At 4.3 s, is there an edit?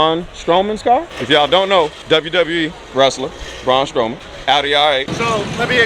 yes; 4 cuts; at 1.1 s, 2.0 s, 4.3 s, 5.1 s

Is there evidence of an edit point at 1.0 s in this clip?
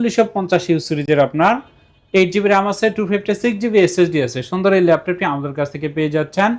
no; 0 cuts

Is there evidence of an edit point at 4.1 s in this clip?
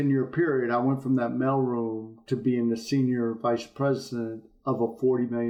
no; 0 cuts

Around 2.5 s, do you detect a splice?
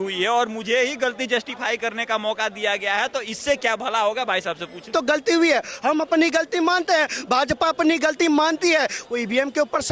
no; 1 cut; at 4.9 s

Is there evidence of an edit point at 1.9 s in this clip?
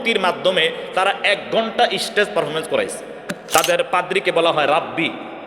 no; 1 cut; at 3.4 s

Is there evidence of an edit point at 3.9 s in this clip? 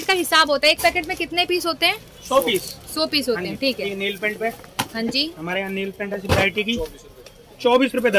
yes; 1 cut; at 3.9 s

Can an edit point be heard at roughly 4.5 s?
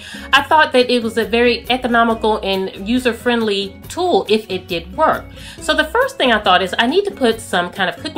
no; 1 cut; at 2.9 s

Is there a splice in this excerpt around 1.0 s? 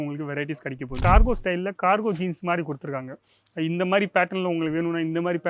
yes; 1 cut; at 1.0 s

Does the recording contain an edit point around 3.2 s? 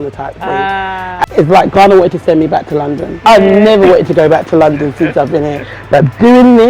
yes; 2 cuts; at 1.2 s, 3.2 s

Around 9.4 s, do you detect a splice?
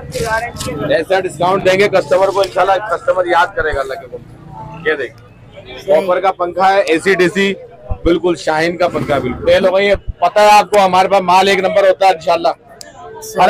yes; 1 cut; at 9.4 s

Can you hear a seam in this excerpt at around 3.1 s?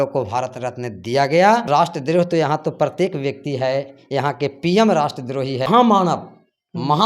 no; 2 cuts; at 1.7 s, 5.7 s

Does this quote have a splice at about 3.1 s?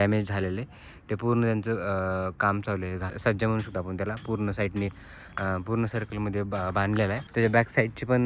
yes; 2 cuts; at 3.1 s, 7.2 s

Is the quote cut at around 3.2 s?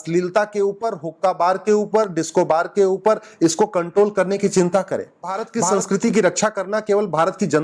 no; 1 cut; at 5.4 s

